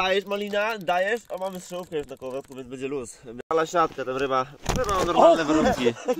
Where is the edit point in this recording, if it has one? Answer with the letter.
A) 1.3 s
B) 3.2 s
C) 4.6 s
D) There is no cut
B